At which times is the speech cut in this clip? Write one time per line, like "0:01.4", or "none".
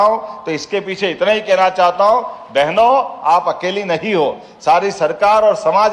none